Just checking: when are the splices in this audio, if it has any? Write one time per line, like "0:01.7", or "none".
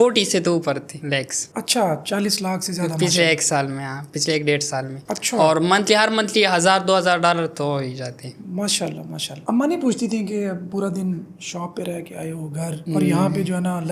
none

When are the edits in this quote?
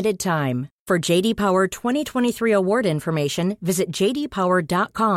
none

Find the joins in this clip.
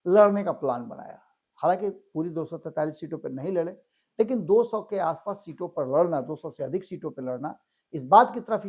none

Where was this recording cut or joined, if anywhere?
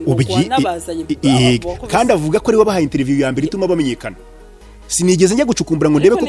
none

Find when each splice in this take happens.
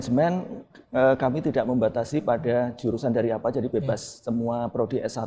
none

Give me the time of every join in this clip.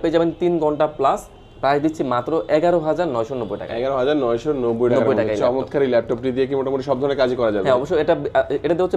none

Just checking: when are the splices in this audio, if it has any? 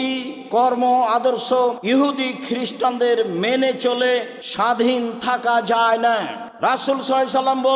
0:01.8
0:04.4
0:06.4

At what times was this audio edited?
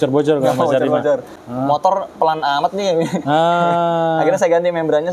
0:01.4

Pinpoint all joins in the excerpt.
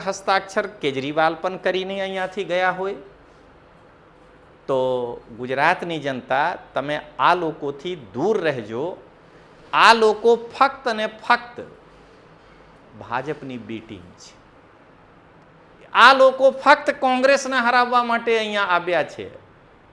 none

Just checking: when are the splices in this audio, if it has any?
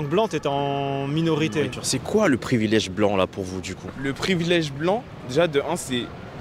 0:01.8

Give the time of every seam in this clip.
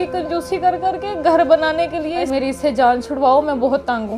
0:02.3

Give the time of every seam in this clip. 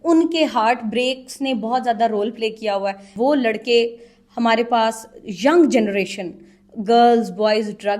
0:03.0

